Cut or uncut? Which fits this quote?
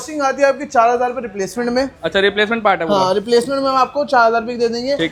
uncut